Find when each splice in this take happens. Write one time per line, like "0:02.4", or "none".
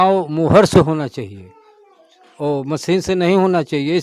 none